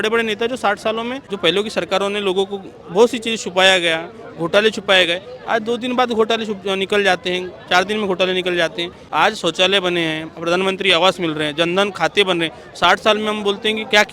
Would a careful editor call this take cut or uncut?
cut